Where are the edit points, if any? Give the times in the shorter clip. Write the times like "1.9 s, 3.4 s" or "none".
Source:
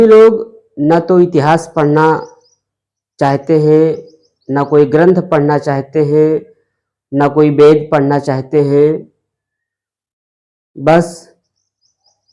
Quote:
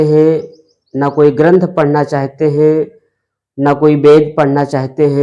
none